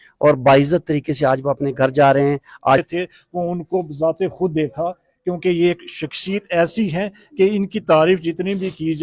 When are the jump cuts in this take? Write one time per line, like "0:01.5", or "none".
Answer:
0:02.8